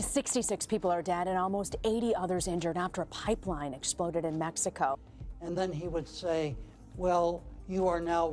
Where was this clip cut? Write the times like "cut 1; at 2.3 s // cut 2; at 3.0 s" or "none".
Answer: none